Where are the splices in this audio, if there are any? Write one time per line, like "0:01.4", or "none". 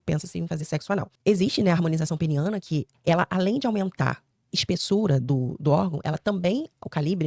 0:01.1
0:02.9